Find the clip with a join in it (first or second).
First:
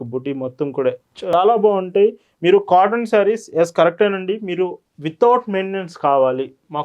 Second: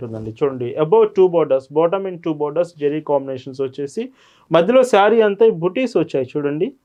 first